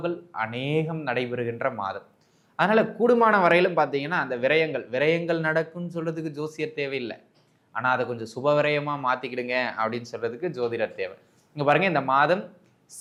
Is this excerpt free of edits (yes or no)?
yes